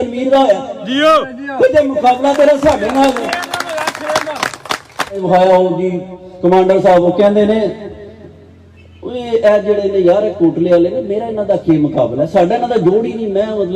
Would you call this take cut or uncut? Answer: cut